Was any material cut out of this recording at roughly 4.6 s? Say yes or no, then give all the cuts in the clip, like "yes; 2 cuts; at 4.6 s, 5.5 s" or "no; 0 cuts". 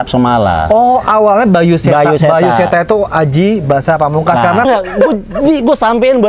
yes; 1 cut; at 4.6 s